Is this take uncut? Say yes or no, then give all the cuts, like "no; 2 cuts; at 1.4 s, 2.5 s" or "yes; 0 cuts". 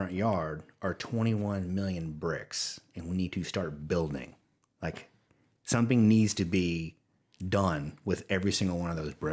yes; 0 cuts